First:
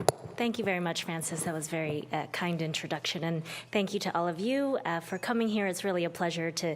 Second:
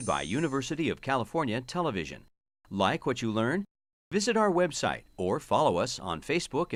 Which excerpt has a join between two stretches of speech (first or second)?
first